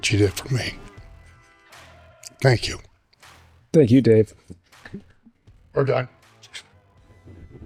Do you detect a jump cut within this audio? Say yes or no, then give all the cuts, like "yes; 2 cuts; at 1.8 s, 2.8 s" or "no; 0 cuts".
no; 0 cuts